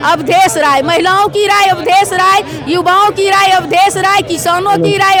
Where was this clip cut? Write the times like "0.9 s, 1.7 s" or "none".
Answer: none